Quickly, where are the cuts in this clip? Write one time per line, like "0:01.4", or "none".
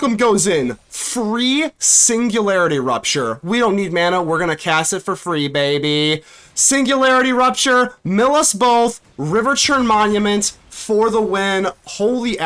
none